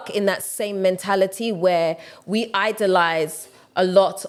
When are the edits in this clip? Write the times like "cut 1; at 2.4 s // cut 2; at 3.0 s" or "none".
none